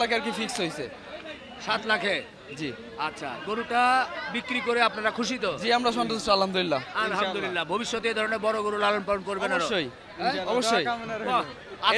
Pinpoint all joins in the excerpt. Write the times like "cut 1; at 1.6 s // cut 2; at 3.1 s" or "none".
none

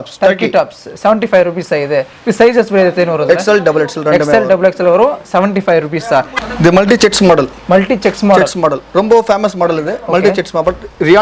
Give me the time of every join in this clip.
cut 1; at 6.3 s

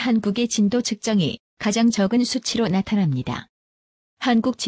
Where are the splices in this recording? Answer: cut 1; at 3.5 s

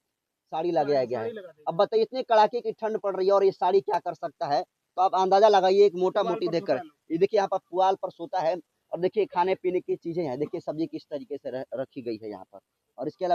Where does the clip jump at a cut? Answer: none

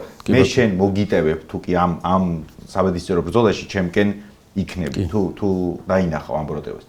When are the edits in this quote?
none

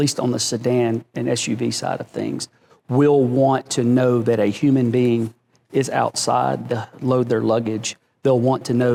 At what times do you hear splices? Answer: none

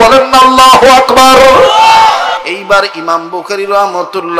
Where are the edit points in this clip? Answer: cut 1; at 2.4 s

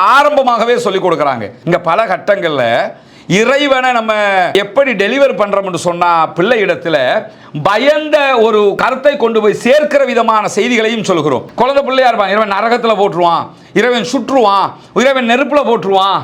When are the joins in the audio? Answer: cut 1; at 1.5 s // cut 2; at 4.5 s // cut 3; at 8.8 s // cut 4; at 11.5 s

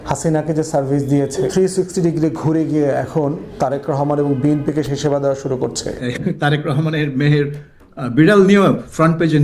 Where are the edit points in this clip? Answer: cut 1; at 1.4 s // cut 2; at 6.0 s

